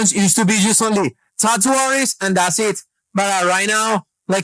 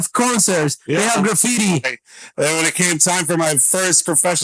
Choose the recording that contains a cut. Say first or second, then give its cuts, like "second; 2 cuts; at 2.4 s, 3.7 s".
second; 1 cut; at 2.0 s